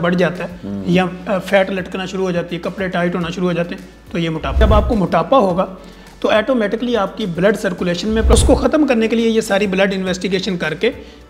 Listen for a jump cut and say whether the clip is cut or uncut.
cut